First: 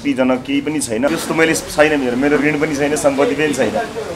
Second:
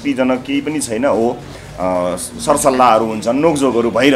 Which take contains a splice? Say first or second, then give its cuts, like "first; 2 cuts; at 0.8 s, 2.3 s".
first; 1 cut; at 1.1 s